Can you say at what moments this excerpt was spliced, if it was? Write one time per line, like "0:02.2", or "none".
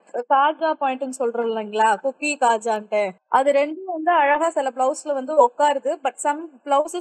0:03.2